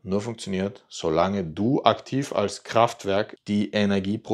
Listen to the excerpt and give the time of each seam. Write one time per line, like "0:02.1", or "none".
0:03.4